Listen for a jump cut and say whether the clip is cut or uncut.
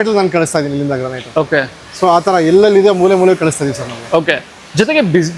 uncut